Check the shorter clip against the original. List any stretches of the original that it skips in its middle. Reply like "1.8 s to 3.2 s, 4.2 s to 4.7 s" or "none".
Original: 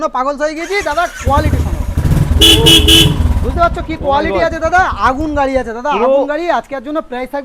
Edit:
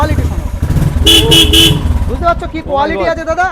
none